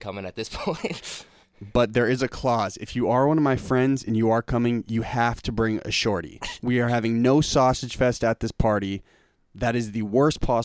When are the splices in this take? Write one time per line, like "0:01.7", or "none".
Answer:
none